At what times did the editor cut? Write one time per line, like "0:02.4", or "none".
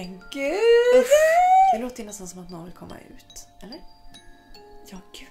0:02.0